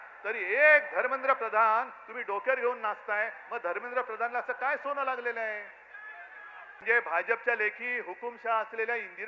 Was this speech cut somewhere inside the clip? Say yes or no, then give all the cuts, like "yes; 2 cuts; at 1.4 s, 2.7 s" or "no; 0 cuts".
yes; 1 cut; at 6.8 s